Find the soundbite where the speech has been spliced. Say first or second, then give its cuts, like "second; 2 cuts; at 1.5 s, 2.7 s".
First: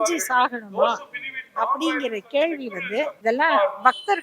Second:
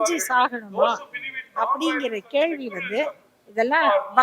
first; 1 cut; at 3.1 s